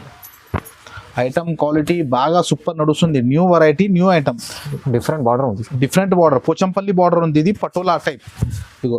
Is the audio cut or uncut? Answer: uncut